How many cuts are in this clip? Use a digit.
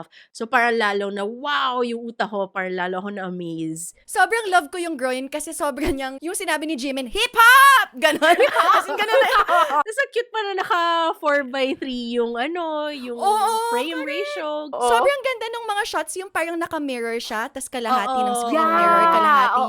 4